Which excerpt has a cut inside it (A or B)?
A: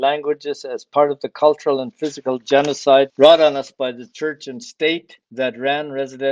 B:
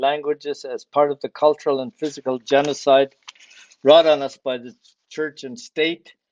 A